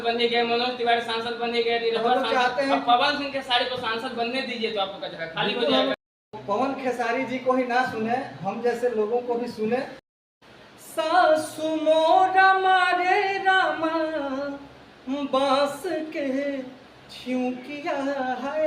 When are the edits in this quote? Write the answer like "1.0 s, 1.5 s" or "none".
6.3 s, 10.0 s